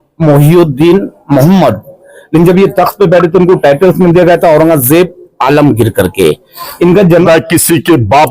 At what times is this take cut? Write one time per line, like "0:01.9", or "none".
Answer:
0:07.2